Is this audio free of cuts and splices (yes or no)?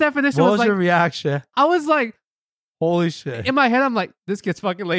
yes